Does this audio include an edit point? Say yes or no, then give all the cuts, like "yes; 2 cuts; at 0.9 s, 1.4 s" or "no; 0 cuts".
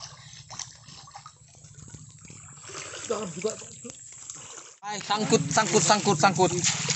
yes; 1 cut; at 5.0 s